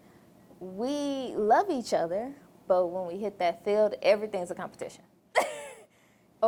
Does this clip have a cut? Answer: no; 0 cuts

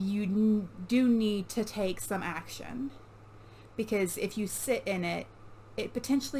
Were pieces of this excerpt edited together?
no; 0 cuts

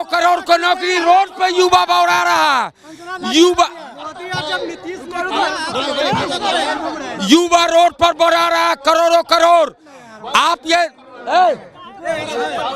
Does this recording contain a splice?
no; 0 cuts

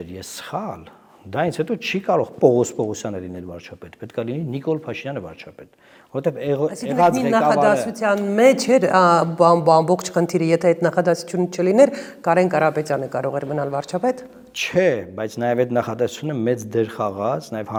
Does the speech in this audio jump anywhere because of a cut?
no; 0 cuts

